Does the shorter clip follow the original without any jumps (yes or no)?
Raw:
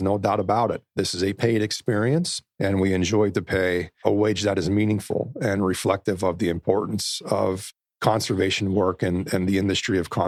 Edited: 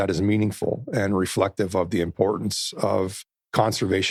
yes